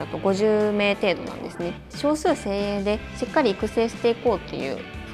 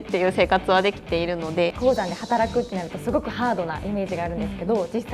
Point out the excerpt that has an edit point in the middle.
second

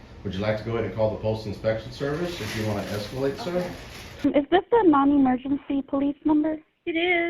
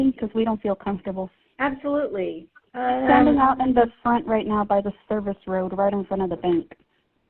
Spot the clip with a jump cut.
first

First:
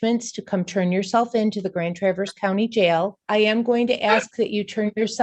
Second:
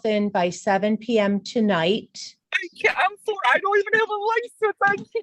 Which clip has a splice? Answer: first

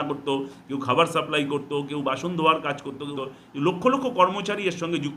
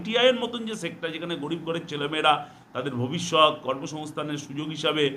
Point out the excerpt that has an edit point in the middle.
first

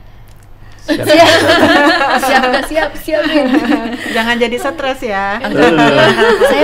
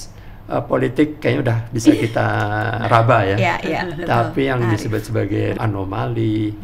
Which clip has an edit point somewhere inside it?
second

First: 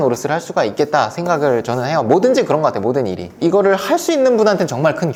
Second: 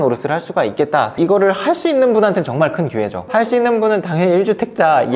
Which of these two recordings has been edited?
second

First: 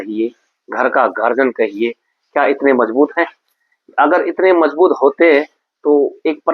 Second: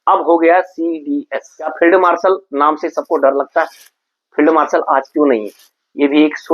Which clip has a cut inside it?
second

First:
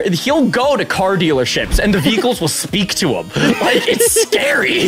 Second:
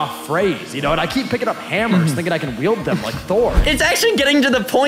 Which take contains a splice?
second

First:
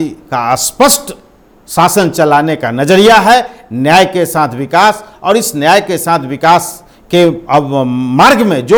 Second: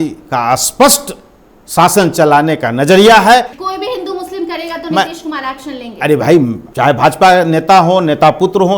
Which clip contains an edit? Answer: second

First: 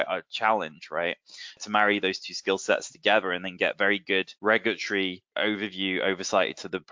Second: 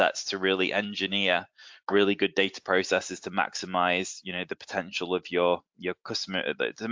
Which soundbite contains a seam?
first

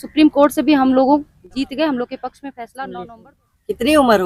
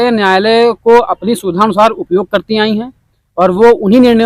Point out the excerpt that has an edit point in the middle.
first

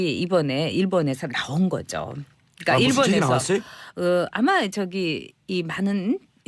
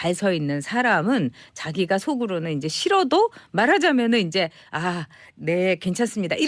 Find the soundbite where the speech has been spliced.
first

